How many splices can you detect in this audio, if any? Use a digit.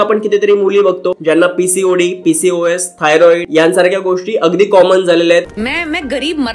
3